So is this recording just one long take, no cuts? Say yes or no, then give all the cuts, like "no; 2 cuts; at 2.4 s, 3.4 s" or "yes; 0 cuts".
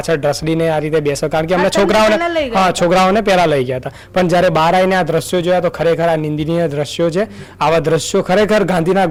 yes; 0 cuts